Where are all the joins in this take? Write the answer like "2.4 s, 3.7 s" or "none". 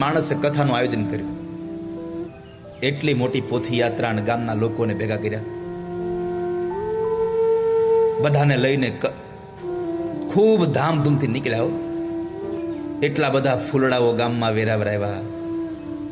2.3 s, 12.5 s